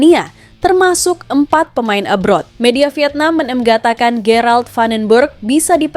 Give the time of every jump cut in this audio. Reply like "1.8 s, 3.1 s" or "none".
2.5 s